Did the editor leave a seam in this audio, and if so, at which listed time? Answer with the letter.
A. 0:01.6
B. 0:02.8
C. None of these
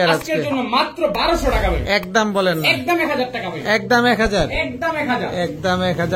C